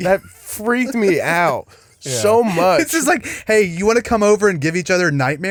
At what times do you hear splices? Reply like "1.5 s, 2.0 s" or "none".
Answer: none